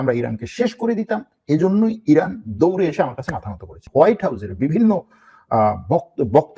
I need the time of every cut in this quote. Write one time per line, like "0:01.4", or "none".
0:03.8